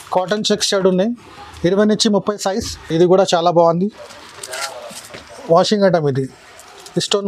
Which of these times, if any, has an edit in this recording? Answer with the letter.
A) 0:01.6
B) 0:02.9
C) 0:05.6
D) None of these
B